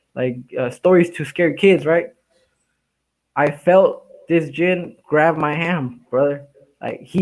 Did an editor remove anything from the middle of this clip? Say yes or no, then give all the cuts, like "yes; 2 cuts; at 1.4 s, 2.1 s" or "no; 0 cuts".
no; 0 cuts